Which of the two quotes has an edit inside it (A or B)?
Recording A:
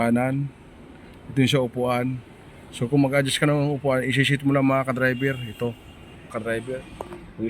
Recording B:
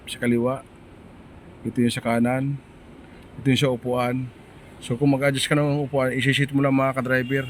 A